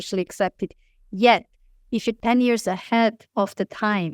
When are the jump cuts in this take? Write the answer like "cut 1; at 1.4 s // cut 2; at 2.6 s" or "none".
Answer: cut 1; at 2.2 s // cut 2; at 3.2 s

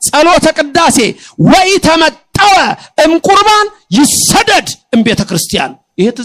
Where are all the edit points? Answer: none

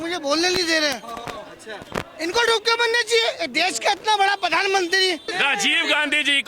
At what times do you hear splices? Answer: cut 1; at 5.3 s

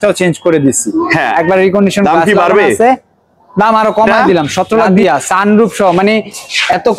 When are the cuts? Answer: cut 1; at 5.0 s

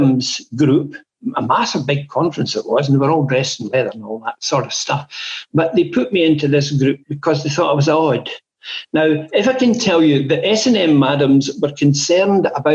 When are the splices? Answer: none

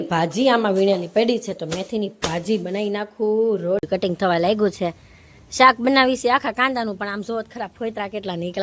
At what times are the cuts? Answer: cut 1; at 3.8 s

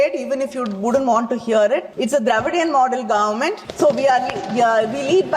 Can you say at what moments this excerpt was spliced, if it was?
cut 1; at 1.9 s // cut 2; at 3.6 s

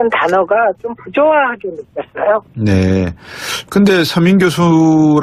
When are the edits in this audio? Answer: cut 1; at 3.3 s

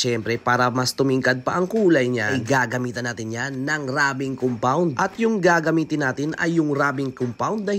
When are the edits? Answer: none

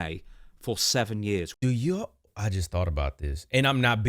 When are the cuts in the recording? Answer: cut 1; at 1.5 s

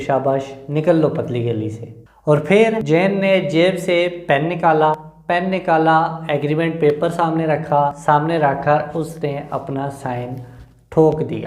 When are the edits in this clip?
cut 1; at 2.1 s // cut 2; at 2.8 s // cut 3; at 5.1 s // cut 4; at 8.0 s

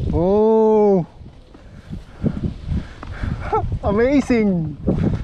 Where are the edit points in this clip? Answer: none

